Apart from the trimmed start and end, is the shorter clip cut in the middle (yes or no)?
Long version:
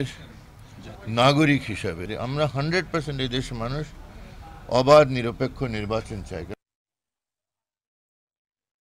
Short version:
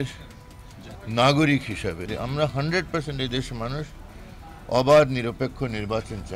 no